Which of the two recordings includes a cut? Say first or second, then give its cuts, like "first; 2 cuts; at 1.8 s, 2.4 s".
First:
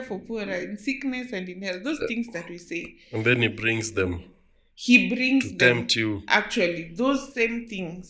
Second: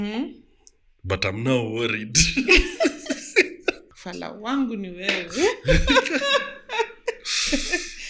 second; 1 cut; at 3.8 s